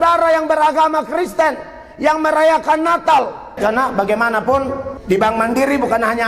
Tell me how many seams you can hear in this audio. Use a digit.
2